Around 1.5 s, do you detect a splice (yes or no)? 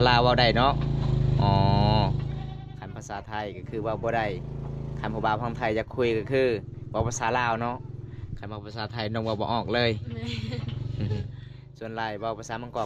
no